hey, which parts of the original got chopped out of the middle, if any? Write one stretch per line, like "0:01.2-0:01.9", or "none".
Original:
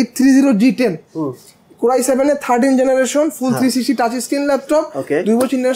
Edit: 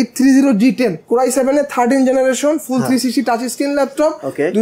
0:01.0-0:01.7